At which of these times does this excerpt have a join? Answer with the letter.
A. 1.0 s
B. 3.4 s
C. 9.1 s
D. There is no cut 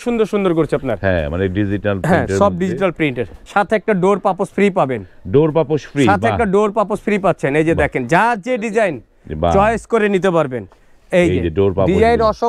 B